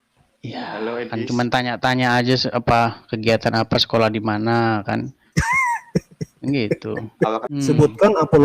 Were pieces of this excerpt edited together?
yes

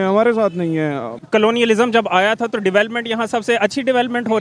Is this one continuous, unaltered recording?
no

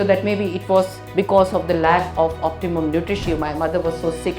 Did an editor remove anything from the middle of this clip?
yes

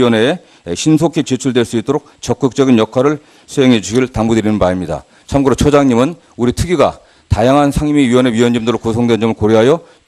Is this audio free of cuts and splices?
yes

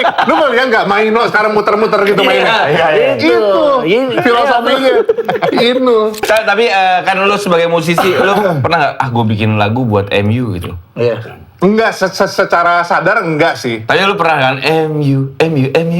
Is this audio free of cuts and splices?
no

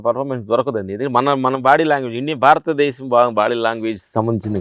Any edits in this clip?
no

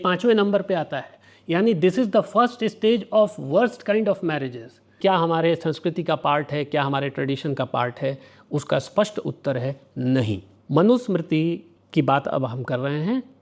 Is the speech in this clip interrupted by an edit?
yes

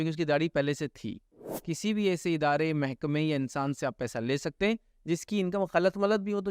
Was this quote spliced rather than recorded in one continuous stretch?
yes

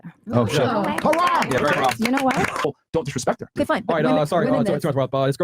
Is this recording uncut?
no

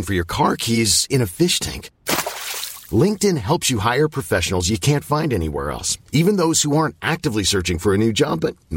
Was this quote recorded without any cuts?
yes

